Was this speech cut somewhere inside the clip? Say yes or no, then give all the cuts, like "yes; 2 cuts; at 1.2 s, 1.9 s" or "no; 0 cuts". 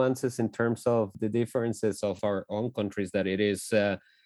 yes; 2 cuts; at 1.1 s, 2.2 s